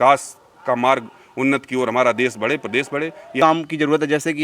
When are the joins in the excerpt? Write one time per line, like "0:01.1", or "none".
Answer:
0:03.4